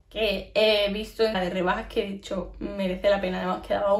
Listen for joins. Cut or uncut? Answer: cut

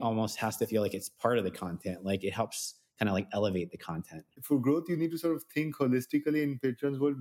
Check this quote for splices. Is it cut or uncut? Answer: cut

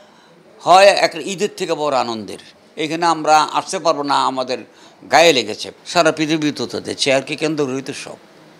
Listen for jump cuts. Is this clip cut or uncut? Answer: cut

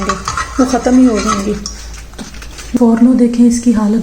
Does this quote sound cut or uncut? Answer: cut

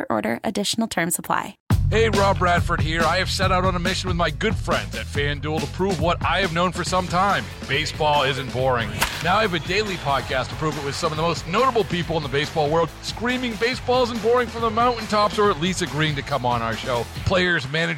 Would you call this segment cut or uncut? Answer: cut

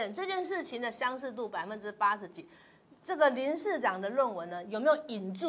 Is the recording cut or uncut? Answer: uncut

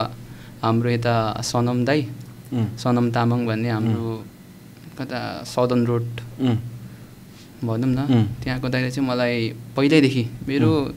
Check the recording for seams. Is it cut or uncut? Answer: uncut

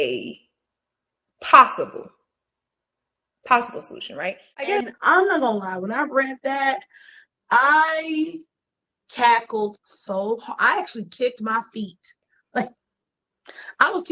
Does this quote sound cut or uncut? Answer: cut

